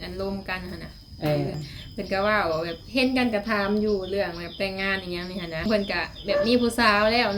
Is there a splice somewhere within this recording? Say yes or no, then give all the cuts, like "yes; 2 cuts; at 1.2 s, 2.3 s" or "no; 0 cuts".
yes; 2 cuts; at 1.5 s, 5.7 s